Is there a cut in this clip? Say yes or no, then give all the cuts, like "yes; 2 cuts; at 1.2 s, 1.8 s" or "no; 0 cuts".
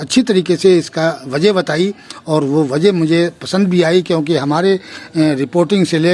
no; 0 cuts